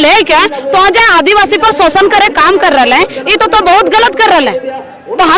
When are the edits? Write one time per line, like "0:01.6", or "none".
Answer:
none